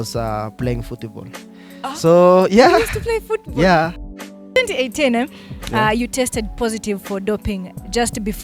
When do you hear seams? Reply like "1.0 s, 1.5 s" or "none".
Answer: 4.4 s